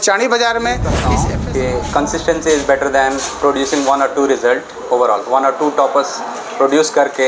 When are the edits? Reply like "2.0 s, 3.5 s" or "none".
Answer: 1.2 s